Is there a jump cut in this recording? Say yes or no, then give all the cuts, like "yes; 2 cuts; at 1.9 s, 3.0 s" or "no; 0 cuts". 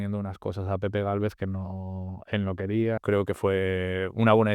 yes; 1 cut; at 3.0 s